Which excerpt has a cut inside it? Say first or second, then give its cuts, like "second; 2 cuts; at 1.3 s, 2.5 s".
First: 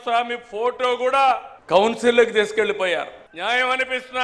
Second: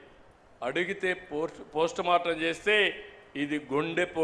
first; 2 cuts; at 1.5 s, 3.5 s